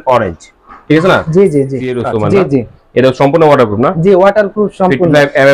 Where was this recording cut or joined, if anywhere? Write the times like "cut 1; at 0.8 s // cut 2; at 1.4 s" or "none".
cut 1; at 2.0 s